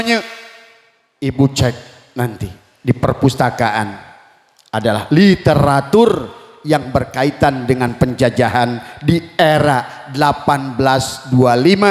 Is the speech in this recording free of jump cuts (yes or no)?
yes